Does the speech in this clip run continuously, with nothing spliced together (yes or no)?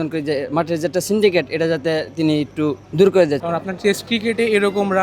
no